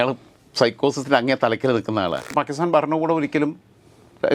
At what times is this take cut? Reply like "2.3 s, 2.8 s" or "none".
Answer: 2.3 s